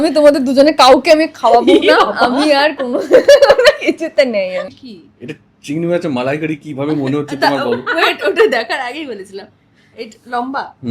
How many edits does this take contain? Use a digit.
1